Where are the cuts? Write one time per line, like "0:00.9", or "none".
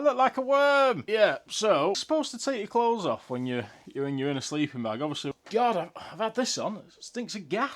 0:02.0
0:05.3